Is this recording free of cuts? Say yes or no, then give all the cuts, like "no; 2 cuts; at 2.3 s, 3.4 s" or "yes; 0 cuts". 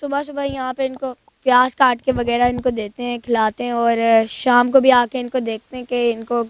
yes; 0 cuts